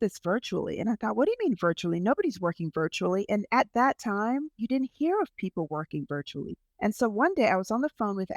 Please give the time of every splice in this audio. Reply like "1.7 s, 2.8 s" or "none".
4.6 s, 6.6 s